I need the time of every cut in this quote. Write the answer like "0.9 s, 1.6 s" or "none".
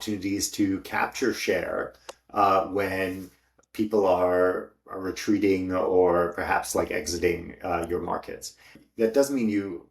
8.8 s